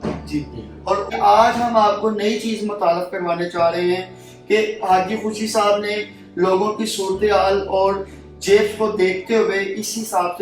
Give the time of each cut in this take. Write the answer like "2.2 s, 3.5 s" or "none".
1.1 s

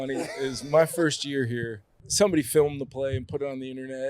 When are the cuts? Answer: 2.0 s

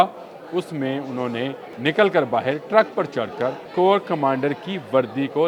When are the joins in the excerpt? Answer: 1.7 s, 3.6 s

